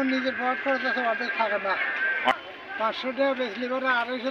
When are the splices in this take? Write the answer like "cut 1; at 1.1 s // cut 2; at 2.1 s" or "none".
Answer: cut 1; at 2.3 s